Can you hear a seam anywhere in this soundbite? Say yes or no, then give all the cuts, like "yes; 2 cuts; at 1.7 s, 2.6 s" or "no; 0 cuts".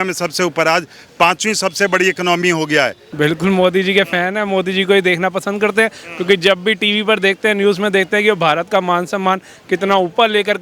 yes; 1 cut; at 3.0 s